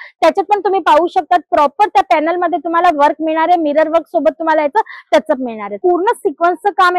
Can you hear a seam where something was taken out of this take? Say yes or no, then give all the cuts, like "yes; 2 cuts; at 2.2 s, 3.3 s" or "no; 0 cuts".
yes; 1 cut; at 5.8 s